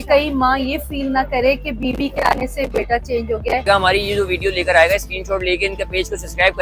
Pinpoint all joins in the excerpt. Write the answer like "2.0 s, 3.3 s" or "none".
3.7 s

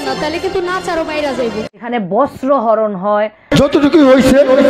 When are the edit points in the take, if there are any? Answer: 1.8 s

